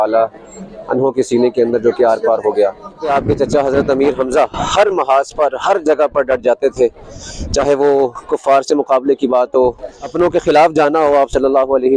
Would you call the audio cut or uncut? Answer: cut